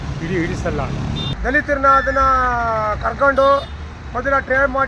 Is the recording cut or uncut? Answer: cut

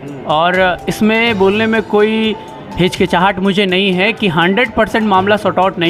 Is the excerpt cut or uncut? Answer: uncut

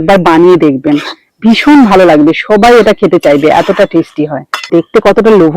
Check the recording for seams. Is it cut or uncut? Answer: cut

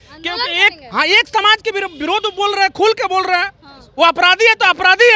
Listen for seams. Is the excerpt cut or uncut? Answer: uncut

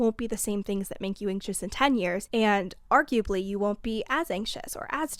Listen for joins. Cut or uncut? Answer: cut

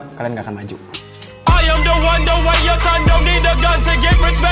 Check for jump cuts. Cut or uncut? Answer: cut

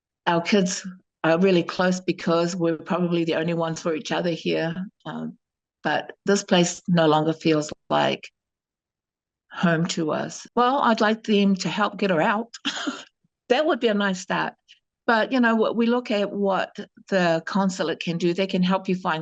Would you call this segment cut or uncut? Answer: cut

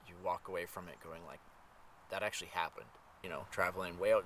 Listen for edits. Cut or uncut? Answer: cut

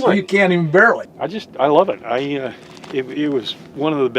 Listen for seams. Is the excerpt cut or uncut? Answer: cut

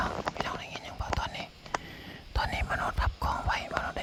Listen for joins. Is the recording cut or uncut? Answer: uncut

